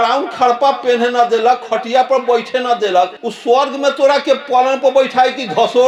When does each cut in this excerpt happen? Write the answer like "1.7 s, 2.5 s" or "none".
none